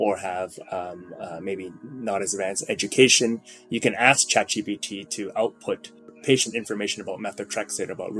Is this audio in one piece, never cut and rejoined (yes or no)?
no